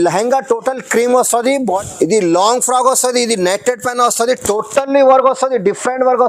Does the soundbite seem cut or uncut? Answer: cut